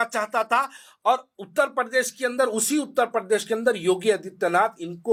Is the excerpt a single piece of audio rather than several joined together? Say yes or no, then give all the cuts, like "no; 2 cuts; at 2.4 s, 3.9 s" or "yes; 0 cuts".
yes; 0 cuts